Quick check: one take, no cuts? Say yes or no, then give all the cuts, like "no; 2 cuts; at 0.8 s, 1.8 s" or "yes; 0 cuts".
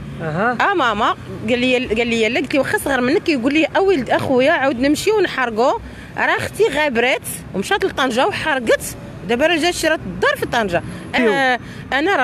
no; 1 cut; at 11.2 s